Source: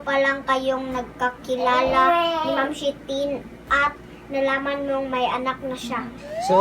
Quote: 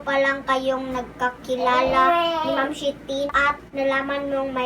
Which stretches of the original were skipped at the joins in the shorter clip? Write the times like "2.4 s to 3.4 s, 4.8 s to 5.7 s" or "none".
3.5 s to 4.0 s